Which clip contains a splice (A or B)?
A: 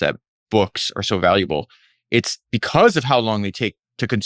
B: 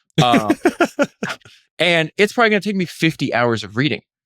B